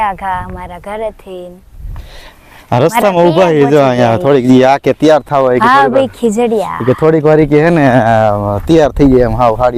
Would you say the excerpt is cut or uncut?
uncut